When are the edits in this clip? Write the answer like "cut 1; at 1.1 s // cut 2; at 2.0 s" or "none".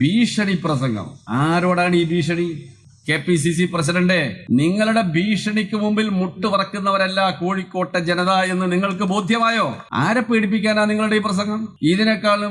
cut 1; at 1.1 s // cut 2; at 4.4 s // cut 3; at 9.8 s // cut 4; at 11.7 s